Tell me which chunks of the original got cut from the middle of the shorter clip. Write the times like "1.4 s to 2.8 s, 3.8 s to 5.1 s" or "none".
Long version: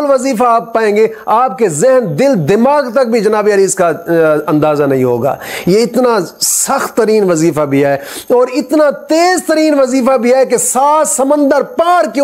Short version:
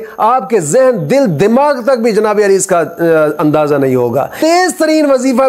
5.4 s to 9.0 s